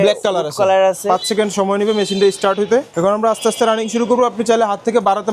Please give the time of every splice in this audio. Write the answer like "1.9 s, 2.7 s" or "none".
1.0 s, 2.9 s